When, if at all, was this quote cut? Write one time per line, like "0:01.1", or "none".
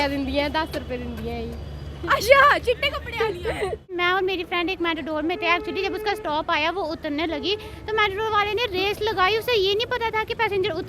0:03.9